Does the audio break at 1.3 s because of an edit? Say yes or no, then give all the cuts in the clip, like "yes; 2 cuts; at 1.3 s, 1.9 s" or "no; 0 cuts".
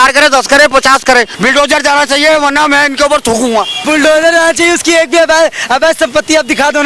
yes; 2 cuts; at 1.3 s, 3.8 s